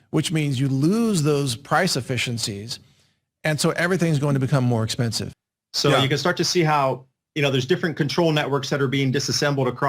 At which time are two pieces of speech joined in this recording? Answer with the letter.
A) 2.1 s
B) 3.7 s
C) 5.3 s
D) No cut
C